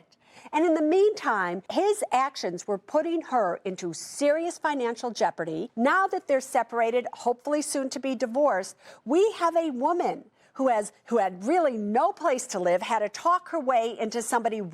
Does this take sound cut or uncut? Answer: cut